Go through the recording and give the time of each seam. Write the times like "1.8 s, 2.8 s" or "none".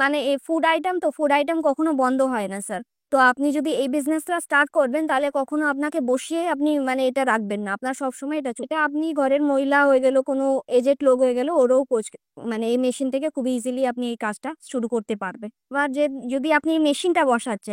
8.7 s, 15.7 s